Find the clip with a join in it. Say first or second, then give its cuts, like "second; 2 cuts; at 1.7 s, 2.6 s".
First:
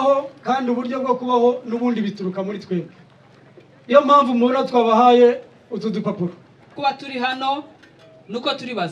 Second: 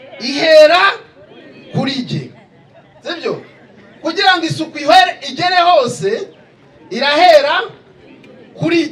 first; 1 cut; at 6.7 s